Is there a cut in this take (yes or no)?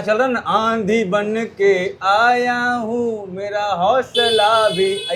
no